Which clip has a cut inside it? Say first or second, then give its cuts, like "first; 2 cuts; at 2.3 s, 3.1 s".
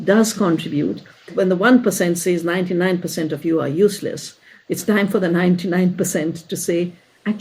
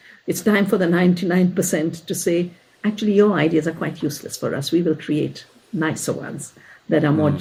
first; 1 cut; at 1.3 s